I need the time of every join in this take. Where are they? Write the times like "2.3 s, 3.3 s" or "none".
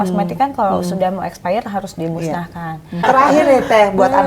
3.0 s